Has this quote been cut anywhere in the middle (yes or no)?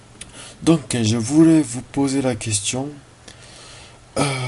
no